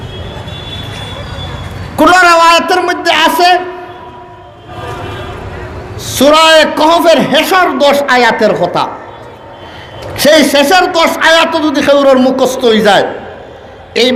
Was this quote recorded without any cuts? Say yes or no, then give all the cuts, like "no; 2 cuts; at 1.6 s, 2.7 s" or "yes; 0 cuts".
yes; 0 cuts